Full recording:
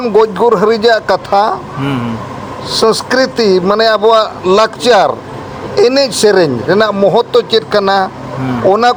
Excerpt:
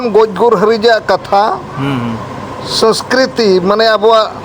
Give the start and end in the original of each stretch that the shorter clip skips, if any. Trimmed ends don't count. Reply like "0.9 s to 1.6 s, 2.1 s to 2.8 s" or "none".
none

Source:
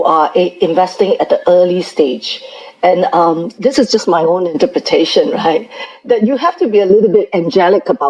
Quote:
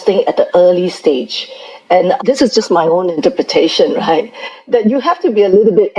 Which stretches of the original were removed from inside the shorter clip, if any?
3.1 s to 3.5 s

